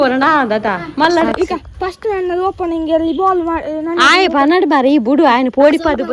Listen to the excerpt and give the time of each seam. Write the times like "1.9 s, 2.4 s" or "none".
1.3 s